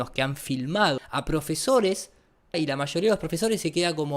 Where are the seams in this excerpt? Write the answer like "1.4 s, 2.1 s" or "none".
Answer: 1.1 s, 2.5 s